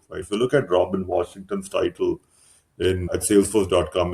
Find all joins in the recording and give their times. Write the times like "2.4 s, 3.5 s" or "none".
none